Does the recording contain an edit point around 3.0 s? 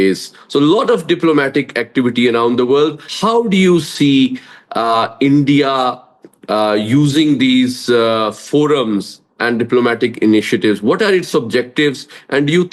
yes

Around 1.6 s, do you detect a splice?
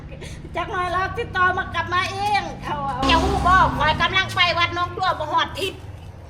no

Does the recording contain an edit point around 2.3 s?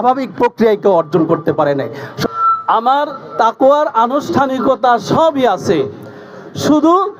yes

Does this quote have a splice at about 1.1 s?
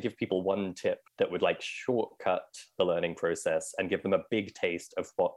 yes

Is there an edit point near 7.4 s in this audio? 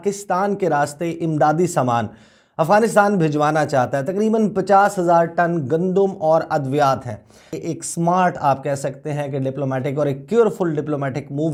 no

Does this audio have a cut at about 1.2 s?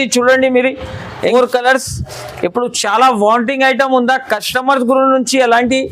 yes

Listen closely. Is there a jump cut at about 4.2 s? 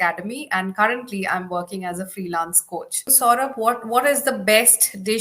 no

